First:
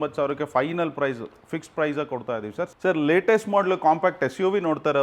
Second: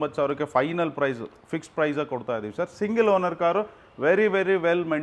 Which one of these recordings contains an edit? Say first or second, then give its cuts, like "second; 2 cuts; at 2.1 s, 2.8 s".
first; 1 cut; at 2.7 s